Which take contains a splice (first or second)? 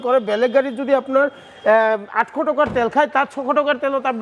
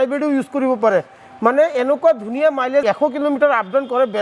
second